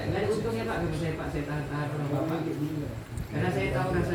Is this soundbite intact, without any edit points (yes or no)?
yes